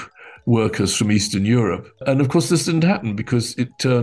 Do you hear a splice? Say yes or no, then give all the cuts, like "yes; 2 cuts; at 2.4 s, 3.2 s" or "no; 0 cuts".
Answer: yes; 1 cut; at 2.0 s